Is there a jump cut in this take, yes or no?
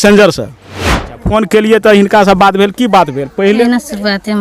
yes